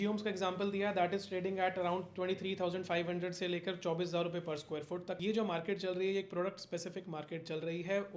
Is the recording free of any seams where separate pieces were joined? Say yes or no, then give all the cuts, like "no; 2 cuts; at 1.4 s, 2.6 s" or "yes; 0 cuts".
no; 1 cut; at 5.2 s